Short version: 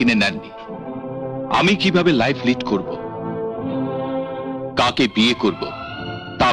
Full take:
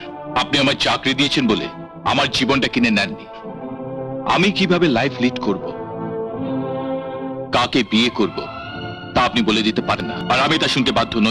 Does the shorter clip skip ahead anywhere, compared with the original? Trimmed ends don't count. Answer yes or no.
no